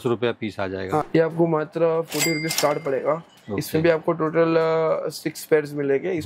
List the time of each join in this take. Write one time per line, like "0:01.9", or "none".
0:01.0